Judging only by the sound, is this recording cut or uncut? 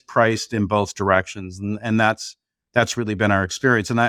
uncut